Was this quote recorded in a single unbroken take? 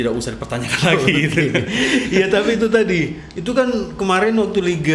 yes; 0 cuts

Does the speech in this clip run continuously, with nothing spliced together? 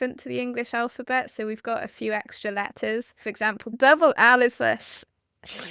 no; 1 cut; at 3.8 s

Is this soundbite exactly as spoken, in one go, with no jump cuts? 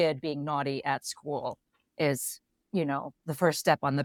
yes; 0 cuts

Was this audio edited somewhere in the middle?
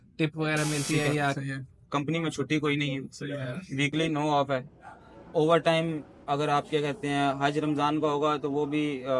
yes; 1 cut; at 1.4 s

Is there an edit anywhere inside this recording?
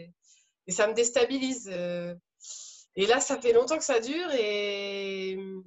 no; 0 cuts

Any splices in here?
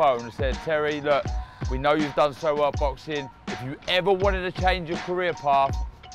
no; 0 cuts

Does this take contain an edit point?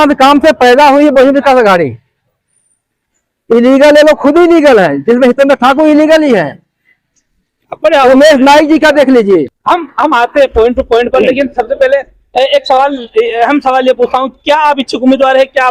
no; 0 cuts

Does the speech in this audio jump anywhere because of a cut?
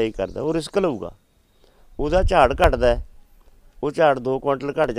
no; 0 cuts

